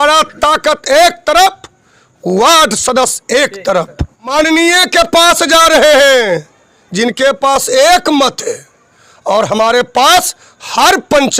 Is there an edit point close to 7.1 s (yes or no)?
no